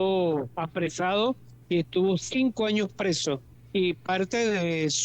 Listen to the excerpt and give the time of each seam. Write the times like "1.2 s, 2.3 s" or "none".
1.5 s, 3.5 s